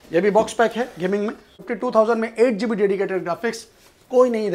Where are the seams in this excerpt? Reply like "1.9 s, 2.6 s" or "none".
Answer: 1.6 s